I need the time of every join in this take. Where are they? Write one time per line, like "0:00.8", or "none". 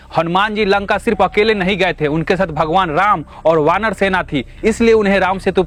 none